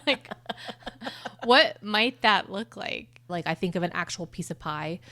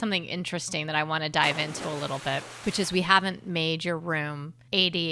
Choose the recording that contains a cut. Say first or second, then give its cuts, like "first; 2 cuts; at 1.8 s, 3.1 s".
first; 1 cut; at 3.3 s